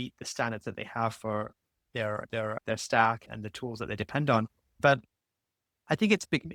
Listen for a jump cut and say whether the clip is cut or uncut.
uncut